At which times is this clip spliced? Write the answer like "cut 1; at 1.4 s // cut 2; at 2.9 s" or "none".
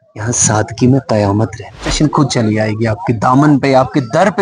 cut 1; at 1.9 s